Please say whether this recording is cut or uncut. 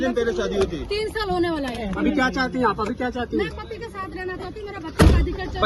uncut